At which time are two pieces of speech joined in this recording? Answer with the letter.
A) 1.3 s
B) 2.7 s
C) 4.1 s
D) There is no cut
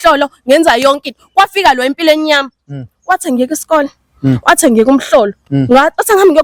D